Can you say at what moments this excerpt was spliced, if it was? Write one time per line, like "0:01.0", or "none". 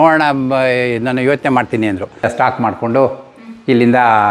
0:02.3

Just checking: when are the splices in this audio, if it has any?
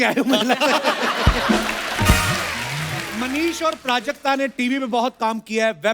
0:03.1

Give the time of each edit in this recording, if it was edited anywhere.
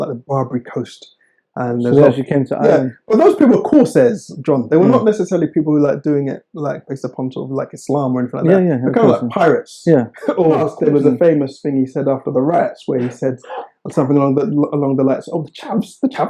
0:10.7

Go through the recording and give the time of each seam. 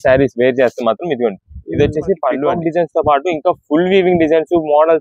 0:02.5

